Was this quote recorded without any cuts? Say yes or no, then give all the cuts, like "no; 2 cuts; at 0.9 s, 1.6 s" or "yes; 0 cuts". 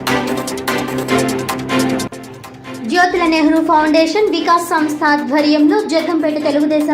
no; 1 cut; at 2.0 s